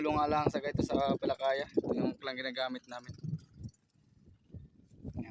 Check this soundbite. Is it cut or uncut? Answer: uncut